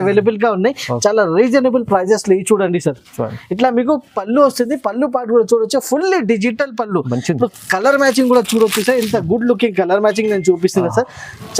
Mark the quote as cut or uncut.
uncut